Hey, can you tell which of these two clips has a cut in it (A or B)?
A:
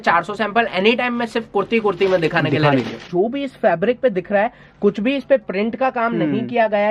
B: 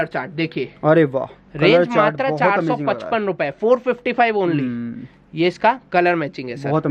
A